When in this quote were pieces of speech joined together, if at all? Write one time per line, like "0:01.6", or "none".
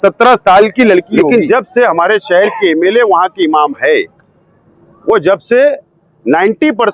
0:01.2